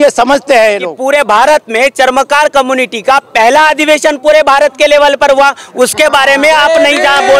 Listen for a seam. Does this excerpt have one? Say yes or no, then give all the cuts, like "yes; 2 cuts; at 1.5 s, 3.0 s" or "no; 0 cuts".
yes; 1 cut; at 0.9 s